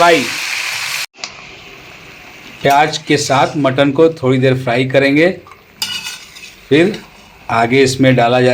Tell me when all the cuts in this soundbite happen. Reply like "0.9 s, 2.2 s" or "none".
1.0 s